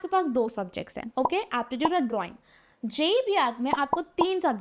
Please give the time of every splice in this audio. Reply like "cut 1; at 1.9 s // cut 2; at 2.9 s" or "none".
cut 1; at 1.1 s